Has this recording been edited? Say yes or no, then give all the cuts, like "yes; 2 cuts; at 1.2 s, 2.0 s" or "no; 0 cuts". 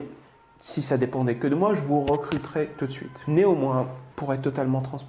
yes; 2 cuts; at 3.1 s, 4.1 s